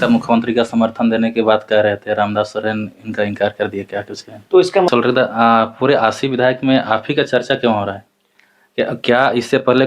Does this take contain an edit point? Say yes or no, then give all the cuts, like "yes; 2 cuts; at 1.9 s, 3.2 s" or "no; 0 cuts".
yes; 1 cut; at 4.9 s